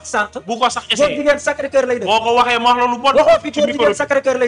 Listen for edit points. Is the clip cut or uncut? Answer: uncut